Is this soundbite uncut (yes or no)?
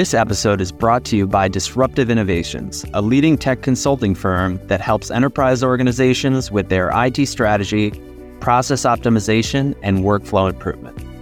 yes